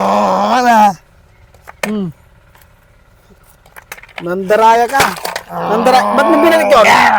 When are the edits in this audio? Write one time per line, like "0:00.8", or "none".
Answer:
none